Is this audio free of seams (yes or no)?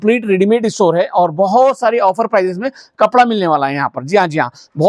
yes